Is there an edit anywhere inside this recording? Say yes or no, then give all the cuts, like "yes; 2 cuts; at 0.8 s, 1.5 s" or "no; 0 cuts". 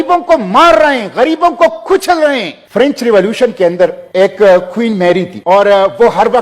yes; 3 cuts; at 2.6 s, 4.0 s, 5.3 s